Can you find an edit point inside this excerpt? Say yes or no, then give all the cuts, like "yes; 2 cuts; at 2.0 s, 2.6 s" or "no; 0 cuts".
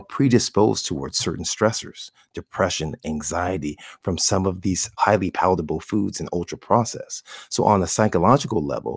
yes; 1 cut; at 4.9 s